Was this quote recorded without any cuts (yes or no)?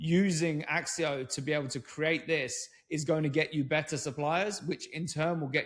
yes